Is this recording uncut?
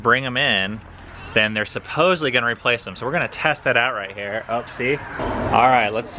no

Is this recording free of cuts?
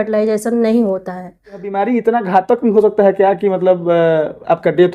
no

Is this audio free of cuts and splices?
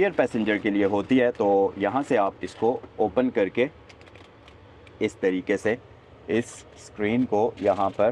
yes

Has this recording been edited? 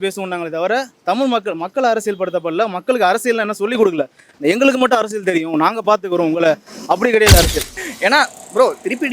yes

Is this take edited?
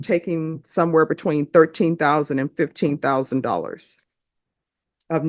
no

